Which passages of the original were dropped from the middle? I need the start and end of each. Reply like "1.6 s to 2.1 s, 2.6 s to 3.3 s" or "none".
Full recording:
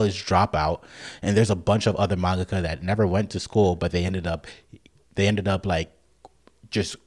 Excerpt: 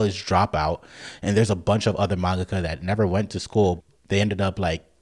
3.8 s to 4.8 s